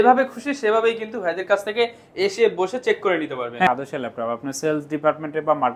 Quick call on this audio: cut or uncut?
cut